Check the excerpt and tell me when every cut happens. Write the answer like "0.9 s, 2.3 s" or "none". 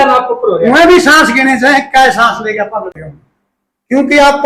3.0 s